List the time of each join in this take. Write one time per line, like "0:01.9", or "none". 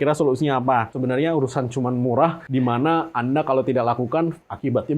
0:00.9
0:02.4